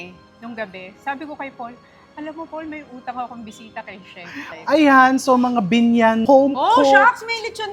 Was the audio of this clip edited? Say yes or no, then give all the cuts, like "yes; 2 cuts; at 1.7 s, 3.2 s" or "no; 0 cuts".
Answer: yes; 2 cuts; at 4.5 s, 6.2 s